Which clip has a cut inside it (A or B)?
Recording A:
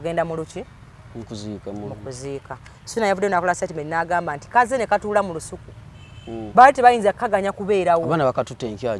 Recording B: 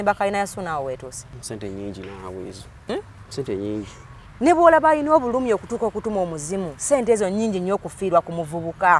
B